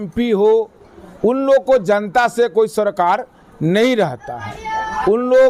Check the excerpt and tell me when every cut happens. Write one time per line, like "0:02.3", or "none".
none